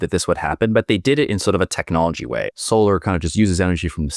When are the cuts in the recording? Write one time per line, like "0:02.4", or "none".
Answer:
0:02.5